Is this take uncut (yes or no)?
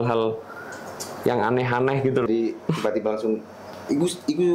no